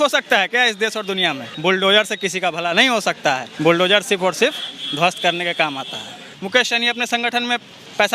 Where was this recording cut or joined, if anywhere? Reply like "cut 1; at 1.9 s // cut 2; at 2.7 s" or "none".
cut 1; at 1.5 s // cut 2; at 3.5 s // cut 3; at 6.3 s